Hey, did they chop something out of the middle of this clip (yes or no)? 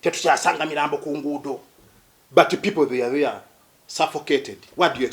no